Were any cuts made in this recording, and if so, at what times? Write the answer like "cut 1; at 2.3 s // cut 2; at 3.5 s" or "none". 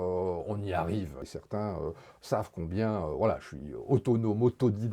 cut 1; at 1.3 s